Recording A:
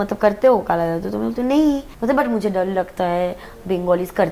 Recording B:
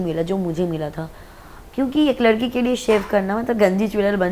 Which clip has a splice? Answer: A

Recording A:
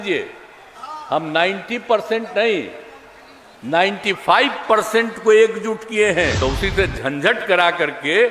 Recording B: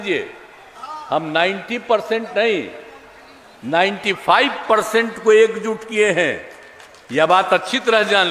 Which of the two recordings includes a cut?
A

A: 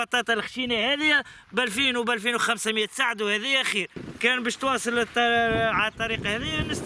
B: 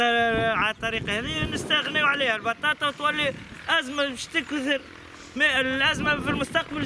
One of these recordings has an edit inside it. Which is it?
A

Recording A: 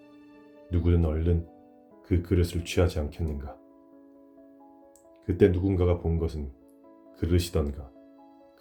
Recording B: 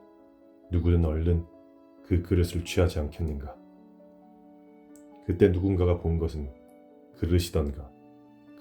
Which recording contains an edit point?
B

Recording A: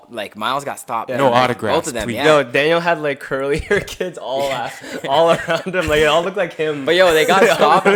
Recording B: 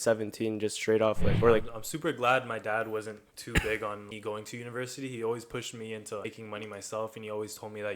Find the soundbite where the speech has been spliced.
B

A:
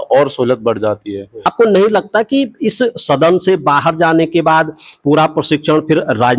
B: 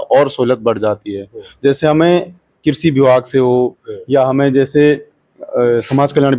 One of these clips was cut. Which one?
A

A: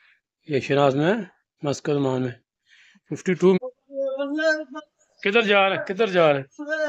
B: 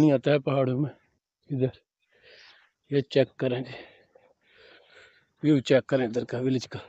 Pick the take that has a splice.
A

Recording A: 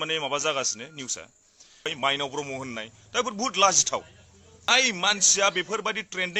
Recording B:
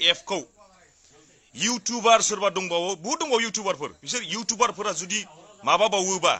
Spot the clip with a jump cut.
A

